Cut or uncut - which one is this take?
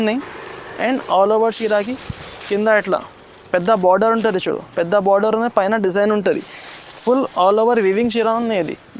uncut